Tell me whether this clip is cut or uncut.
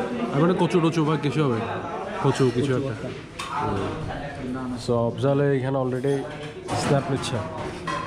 uncut